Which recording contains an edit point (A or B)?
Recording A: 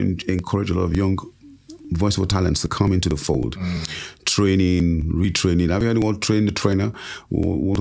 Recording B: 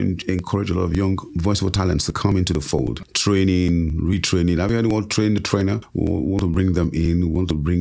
B